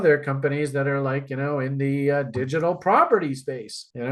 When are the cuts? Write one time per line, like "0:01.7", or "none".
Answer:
none